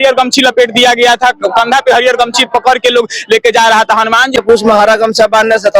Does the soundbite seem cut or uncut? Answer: cut